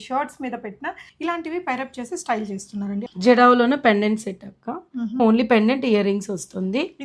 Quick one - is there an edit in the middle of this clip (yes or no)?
yes